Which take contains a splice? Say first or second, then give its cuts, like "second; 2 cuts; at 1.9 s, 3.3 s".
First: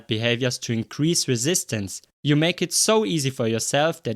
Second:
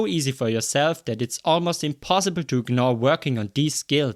first; 1 cut; at 2.1 s